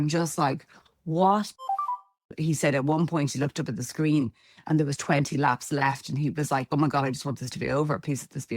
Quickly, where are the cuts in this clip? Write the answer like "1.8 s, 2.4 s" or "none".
1.9 s, 6.7 s

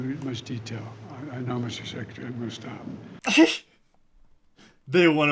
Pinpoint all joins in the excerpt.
3.1 s

